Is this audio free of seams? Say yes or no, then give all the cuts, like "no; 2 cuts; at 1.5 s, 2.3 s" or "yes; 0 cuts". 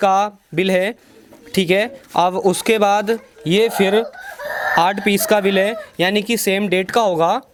yes; 0 cuts